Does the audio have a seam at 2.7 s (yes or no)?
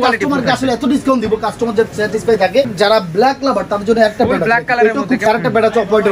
yes